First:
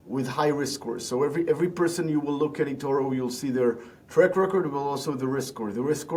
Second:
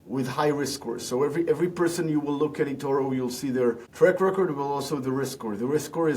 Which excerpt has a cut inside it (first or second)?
second